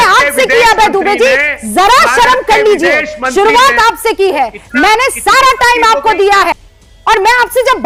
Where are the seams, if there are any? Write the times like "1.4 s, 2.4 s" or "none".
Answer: none